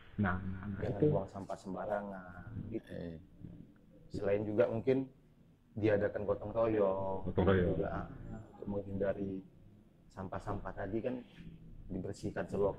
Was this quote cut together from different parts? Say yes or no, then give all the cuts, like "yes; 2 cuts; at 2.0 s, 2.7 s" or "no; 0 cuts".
no; 0 cuts